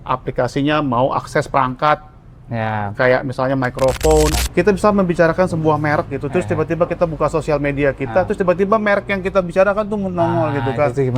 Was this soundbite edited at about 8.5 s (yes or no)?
no